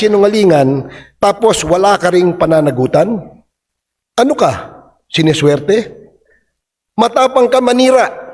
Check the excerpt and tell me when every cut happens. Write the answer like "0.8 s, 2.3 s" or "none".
none